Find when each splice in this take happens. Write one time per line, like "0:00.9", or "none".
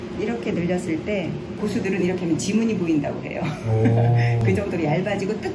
0:01.6